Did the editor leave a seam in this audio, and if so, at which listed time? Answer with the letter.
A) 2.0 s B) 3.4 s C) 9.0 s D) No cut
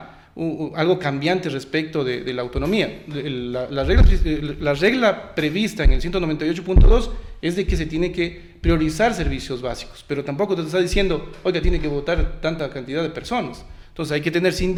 D